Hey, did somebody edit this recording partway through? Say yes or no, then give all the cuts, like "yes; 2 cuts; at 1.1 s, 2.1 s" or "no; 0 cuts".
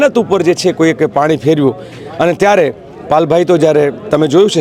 no; 0 cuts